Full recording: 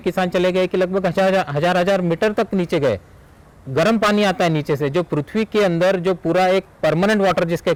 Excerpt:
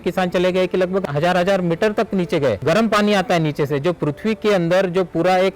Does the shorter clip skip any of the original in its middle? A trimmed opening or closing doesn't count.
yes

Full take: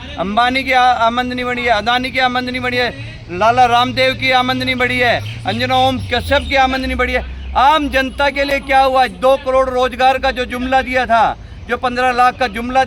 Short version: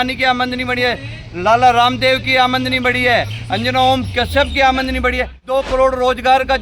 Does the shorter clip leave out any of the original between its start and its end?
yes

